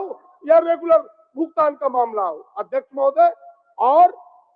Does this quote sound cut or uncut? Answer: uncut